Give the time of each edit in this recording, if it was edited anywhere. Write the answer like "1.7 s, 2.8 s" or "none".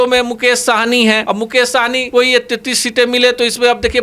1.7 s